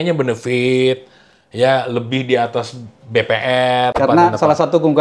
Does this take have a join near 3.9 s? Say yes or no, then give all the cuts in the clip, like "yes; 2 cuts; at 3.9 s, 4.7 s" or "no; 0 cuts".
yes; 1 cut; at 3.9 s